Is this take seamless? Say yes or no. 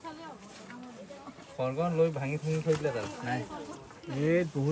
yes